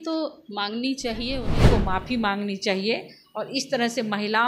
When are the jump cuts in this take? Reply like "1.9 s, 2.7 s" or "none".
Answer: 1.5 s